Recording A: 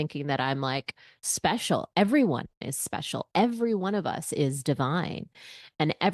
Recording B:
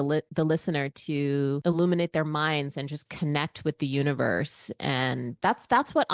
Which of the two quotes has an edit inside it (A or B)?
B